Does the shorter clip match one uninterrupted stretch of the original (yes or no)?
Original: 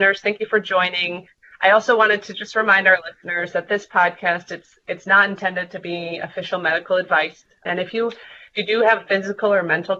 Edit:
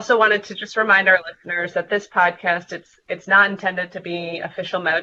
yes